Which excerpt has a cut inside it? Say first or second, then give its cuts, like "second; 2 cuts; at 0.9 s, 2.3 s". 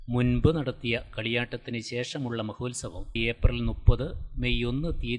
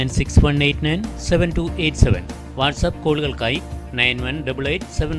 first; 1 cut; at 3.2 s